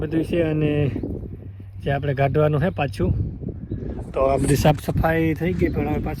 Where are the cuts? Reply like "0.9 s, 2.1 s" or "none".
none